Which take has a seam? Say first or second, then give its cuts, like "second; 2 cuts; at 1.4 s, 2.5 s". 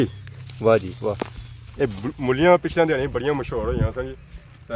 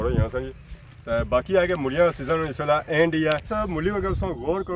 second; 1 cut; at 3.5 s